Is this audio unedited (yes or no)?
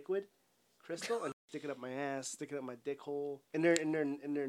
no